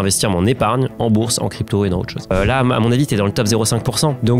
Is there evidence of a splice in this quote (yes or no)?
yes